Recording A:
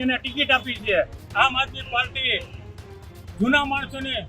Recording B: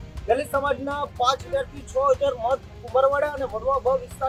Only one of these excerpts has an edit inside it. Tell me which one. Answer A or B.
A